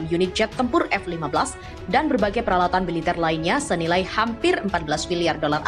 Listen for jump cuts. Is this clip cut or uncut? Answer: uncut